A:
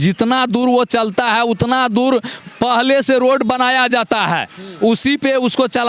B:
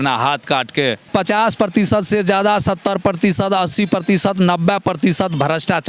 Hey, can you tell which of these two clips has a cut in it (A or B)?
B